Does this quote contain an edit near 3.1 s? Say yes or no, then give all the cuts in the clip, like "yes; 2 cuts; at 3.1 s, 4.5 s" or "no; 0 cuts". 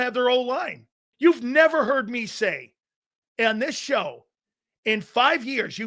no; 1 cut; at 1.1 s